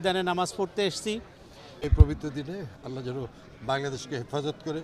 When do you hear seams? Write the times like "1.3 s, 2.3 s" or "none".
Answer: 1.8 s

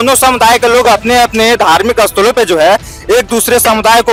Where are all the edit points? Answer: none

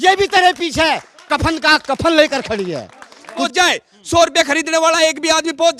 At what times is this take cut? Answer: 3.4 s

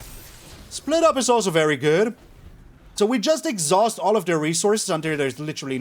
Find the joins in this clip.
2.9 s

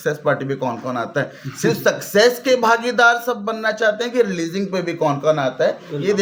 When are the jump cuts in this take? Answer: none

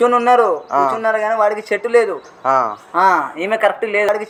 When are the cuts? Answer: none

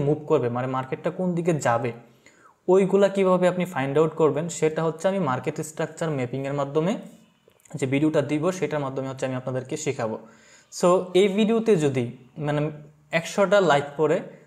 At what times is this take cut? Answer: none

